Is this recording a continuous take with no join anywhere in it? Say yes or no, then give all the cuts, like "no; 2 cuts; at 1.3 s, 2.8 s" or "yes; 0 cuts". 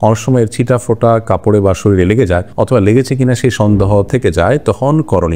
yes; 0 cuts